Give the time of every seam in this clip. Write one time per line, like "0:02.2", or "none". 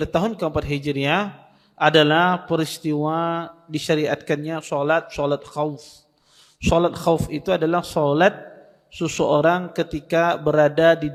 none